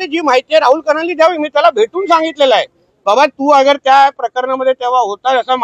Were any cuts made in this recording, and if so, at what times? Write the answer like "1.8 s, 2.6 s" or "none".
none